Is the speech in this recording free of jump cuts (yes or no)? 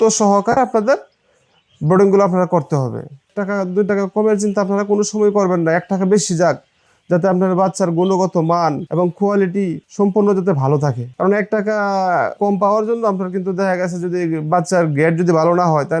no